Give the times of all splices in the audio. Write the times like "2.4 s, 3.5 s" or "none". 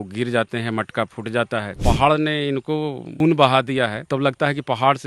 1.7 s, 3.1 s, 4.0 s